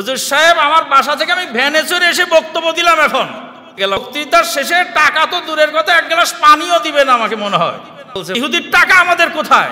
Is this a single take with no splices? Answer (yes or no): no